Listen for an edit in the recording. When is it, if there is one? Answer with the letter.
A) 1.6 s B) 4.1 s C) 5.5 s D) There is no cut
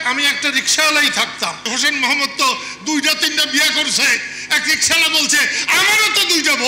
A